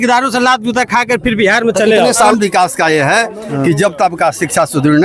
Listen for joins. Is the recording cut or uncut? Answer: cut